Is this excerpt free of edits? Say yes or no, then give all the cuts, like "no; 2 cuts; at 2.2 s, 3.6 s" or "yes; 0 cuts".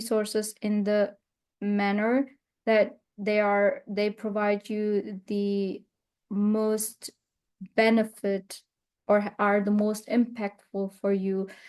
yes; 0 cuts